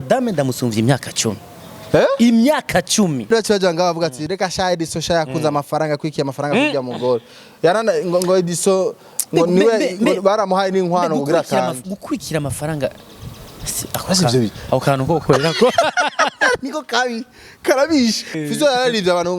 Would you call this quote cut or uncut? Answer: cut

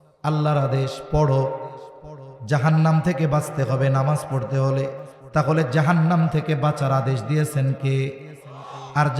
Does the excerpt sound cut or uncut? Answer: cut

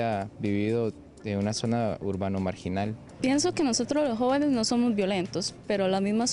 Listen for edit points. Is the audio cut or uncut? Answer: cut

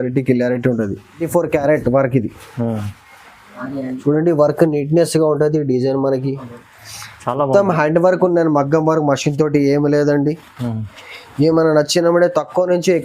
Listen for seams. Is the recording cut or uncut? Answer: cut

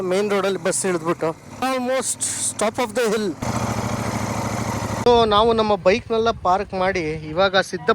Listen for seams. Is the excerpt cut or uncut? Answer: cut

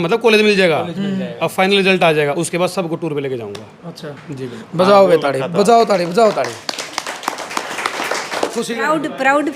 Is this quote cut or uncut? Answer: cut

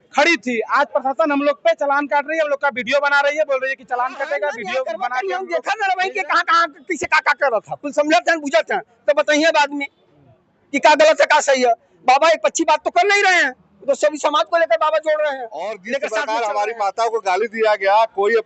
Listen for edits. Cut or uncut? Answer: cut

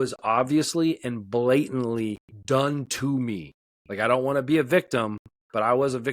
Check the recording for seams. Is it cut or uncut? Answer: cut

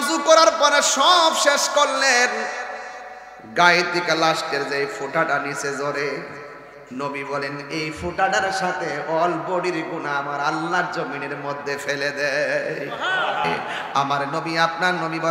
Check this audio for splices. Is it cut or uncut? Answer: cut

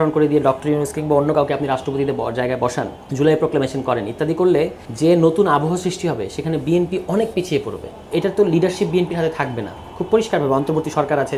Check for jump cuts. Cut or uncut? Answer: cut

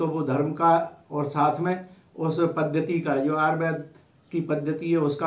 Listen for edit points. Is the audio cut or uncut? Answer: uncut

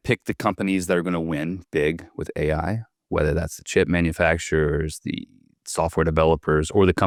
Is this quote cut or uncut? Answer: uncut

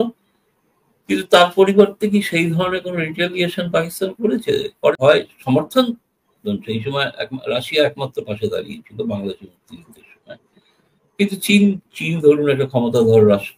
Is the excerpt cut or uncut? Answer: cut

